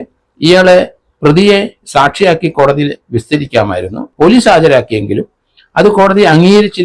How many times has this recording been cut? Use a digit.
1